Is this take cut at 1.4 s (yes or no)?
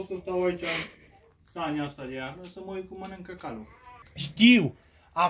no